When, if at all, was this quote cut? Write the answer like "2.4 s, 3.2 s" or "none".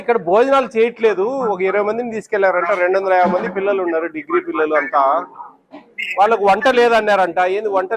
none